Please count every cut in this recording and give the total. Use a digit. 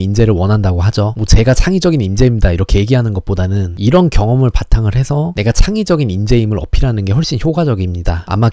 0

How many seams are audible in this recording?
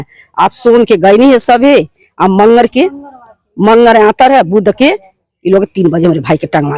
0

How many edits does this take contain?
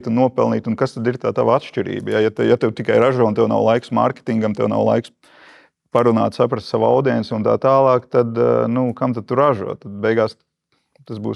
0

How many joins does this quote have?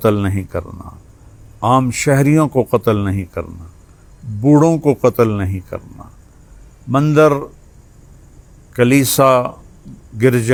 0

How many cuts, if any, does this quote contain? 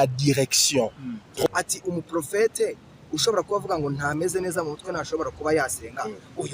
1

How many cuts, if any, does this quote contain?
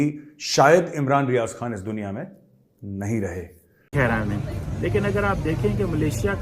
1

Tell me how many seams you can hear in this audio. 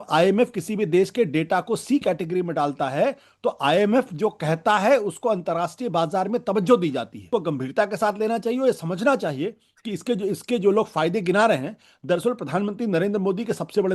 1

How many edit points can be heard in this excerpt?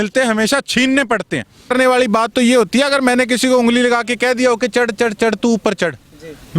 1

